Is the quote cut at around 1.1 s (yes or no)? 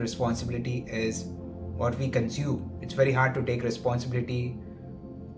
no